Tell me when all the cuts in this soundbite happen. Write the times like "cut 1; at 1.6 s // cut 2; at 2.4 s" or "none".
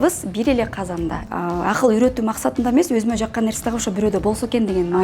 cut 1; at 1.2 s